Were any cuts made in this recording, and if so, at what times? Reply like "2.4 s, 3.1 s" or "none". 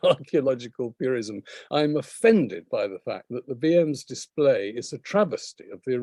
none